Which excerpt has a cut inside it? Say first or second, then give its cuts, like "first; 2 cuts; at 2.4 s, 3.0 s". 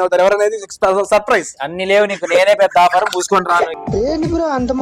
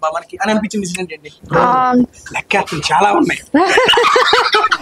first; 1 cut; at 3.7 s